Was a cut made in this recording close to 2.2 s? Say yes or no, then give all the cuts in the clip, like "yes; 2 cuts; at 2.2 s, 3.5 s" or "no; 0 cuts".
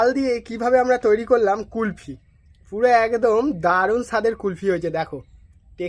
no; 0 cuts